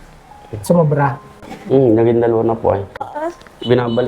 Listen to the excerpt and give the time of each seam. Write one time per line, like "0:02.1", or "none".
0:03.0